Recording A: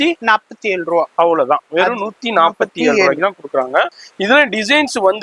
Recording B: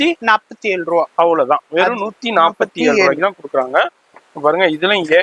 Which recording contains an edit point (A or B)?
A